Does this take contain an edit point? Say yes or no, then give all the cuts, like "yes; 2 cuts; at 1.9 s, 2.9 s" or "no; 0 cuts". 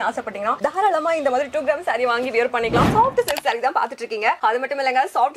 yes; 1 cut; at 2.9 s